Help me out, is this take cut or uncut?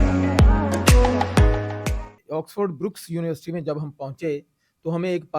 cut